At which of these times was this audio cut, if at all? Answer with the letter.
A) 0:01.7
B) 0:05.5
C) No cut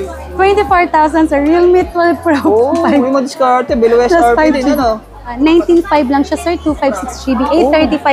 B